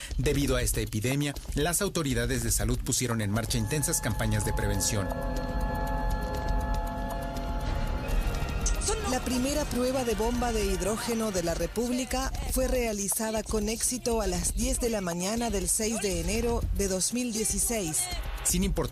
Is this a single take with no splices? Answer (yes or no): yes